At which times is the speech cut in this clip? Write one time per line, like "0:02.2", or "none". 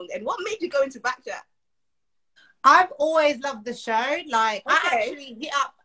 none